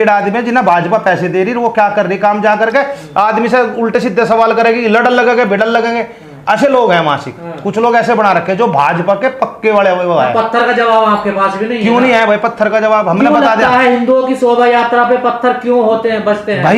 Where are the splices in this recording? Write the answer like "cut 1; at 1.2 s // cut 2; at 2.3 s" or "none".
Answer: none